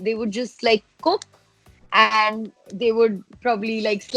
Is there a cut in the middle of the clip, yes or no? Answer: no